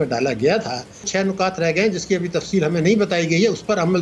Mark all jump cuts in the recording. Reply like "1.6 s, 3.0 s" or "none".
1.1 s